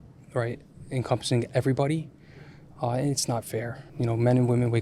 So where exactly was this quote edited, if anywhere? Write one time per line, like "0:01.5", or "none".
0:03.8